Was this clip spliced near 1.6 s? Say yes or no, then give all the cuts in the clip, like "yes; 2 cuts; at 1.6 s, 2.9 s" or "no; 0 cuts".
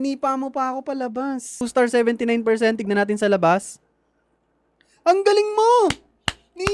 yes; 1 cut; at 1.6 s